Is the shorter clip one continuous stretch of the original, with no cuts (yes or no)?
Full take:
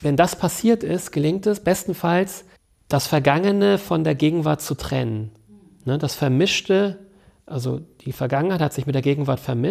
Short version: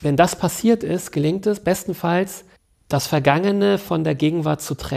yes